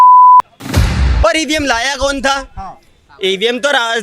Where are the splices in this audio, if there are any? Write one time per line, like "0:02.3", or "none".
0:01.1